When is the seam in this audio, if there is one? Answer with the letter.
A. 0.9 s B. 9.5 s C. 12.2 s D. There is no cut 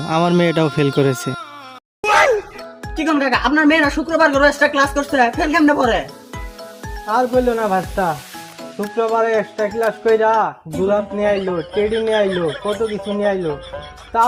D